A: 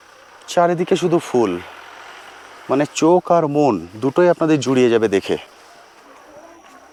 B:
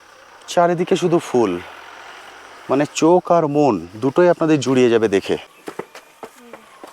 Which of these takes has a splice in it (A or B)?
B